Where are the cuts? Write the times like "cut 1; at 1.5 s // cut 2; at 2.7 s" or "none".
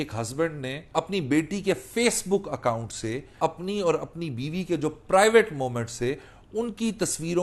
cut 1; at 0.9 s // cut 2; at 3.4 s